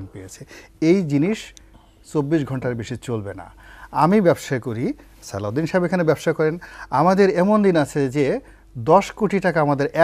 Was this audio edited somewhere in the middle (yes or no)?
no